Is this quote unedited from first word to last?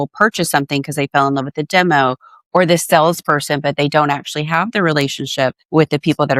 yes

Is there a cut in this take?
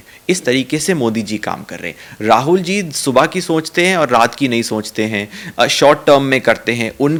no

